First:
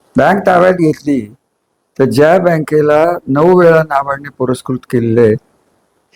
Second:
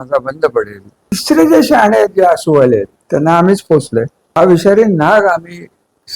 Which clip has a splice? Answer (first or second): second